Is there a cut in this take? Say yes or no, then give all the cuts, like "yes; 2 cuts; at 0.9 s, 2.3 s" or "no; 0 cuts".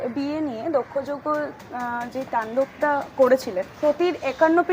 yes; 1 cut; at 3.7 s